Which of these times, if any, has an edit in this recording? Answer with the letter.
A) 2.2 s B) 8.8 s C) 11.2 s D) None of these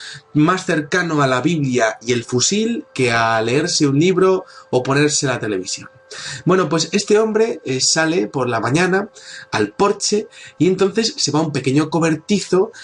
B